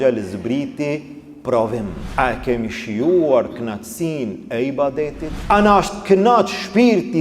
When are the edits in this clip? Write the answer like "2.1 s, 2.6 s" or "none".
2.0 s, 5.3 s